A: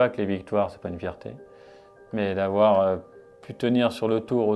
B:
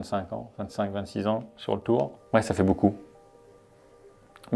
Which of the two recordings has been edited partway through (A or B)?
B